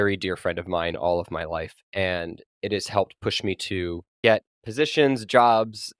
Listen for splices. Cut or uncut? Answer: cut